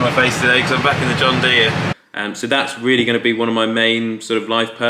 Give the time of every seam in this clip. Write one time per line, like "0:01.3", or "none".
0:01.9